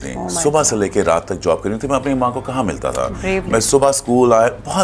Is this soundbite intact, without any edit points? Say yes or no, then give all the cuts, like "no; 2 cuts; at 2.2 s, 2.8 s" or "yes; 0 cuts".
yes; 0 cuts